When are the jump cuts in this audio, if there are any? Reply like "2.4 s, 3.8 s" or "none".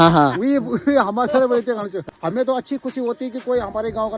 2.0 s

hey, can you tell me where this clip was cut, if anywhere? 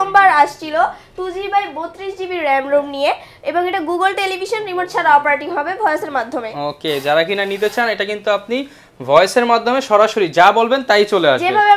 none

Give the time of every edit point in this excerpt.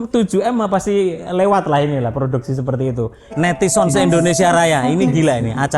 3.2 s

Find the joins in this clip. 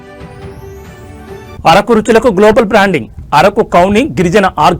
1.2 s

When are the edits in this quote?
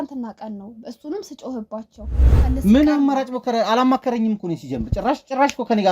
2.3 s

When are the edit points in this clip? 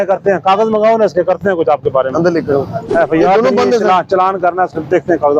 2.8 s

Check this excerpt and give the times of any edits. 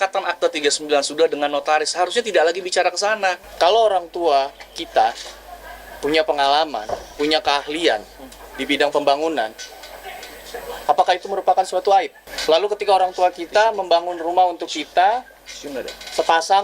3.4 s, 12.2 s

